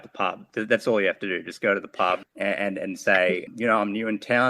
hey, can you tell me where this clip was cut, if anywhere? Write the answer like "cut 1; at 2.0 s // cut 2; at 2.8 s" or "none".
cut 1; at 2.2 s // cut 2; at 3.4 s